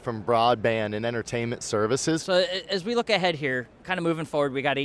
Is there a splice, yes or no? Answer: yes